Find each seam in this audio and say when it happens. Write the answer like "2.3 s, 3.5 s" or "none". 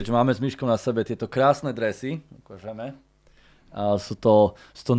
none